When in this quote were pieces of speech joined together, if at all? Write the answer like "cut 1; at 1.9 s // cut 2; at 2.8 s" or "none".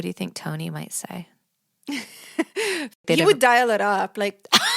cut 1; at 2.9 s